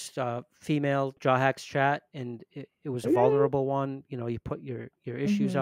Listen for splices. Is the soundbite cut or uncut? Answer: cut